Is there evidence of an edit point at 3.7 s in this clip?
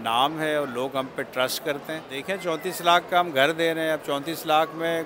no; 1 cut; at 2.1 s

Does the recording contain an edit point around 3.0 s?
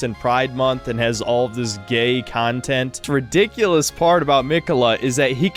yes; 1 cut; at 3.0 s

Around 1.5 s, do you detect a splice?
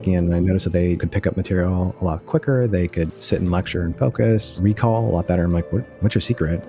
no; 1 cut; at 4.6 s

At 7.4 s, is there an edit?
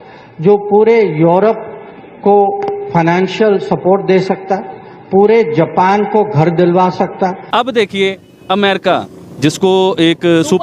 yes; 1 cut; at 7.4 s

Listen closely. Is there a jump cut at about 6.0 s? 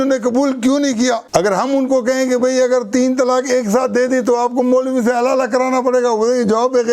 no; 1 cut; at 1.2 s

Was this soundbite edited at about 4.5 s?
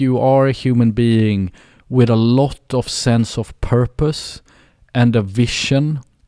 no; 0 cuts

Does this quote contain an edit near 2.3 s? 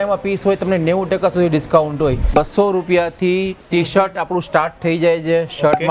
yes; 1 cut; at 2.3 s

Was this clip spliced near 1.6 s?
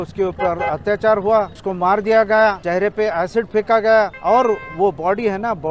yes; 3 cuts; at 1.6 s, 2.6 s, 4.2 s

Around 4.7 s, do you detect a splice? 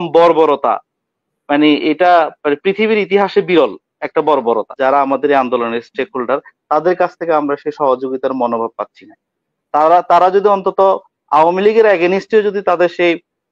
yes; 1 cut; at 4.7 s

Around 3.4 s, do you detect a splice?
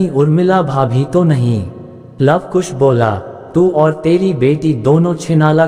no; 1 cut; at 2.0 s

